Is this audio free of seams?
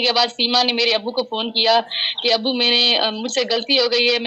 yes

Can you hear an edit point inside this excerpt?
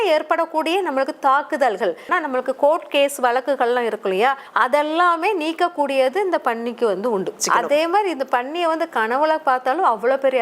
yes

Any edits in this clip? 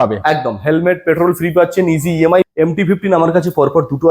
yes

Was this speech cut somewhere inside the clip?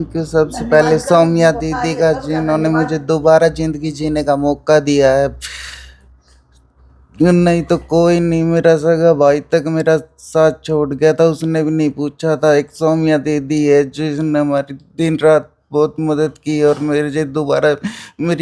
no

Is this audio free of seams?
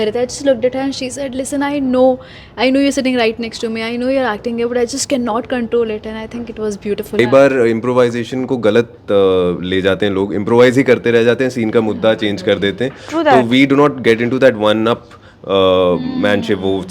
no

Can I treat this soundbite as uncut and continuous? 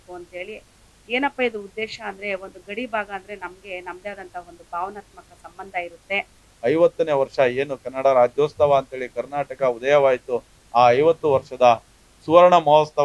no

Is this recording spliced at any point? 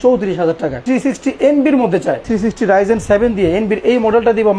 yes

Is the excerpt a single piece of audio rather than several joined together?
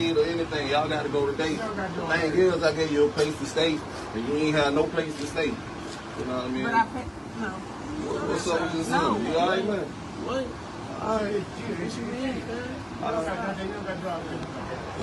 yes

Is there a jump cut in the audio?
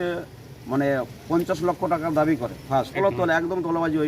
yes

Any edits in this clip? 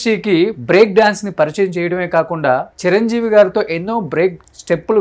no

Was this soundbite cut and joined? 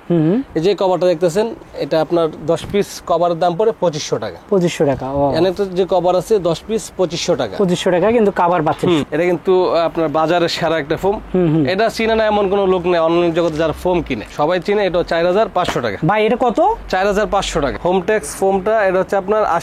yes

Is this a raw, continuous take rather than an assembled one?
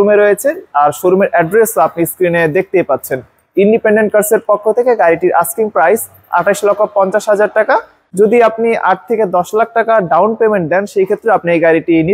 no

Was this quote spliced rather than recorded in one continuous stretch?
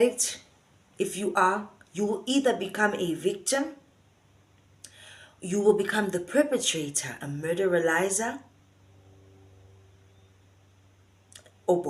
no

